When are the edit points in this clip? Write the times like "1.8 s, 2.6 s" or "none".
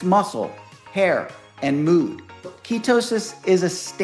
2.6 s